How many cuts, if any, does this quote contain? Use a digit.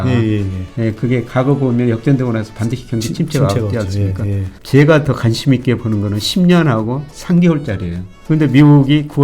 2